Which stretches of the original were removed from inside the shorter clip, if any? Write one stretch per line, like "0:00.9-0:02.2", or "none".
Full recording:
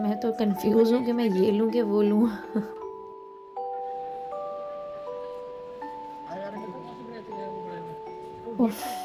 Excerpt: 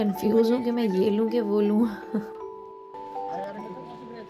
0:03.8-0:06.4

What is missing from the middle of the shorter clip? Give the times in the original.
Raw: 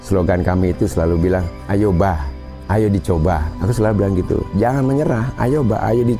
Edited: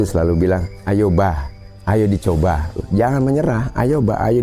0:03.6-0:04.4

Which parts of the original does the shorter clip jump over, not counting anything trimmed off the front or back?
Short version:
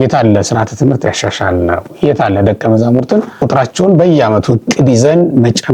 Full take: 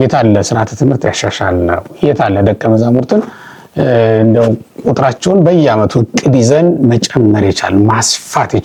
0:03.4-0:04.8

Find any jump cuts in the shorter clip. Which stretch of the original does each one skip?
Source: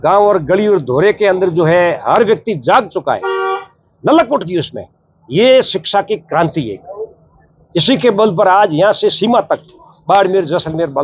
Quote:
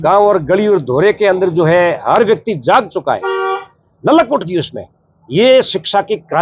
none

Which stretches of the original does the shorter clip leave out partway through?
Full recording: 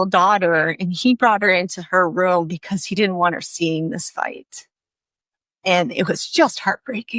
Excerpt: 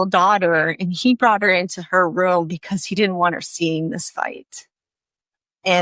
none

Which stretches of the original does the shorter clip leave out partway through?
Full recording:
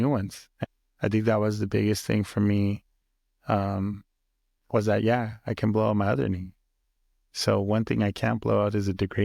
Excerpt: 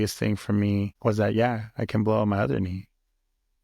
0:02.8-0:04.6

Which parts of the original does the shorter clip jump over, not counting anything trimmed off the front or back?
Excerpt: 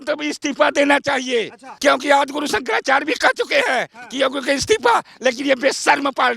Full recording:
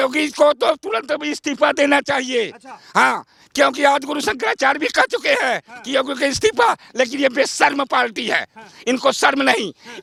0:02.6-0:03.4

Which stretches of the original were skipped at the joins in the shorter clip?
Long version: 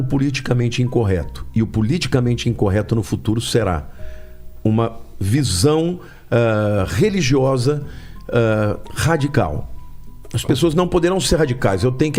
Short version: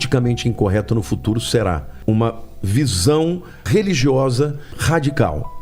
0:03.9-0:04.5
0:06.2-0:06.9
0:08.0-0:08.9

